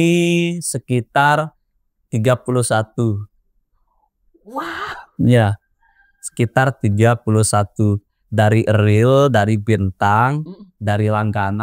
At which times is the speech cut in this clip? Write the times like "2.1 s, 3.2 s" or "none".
none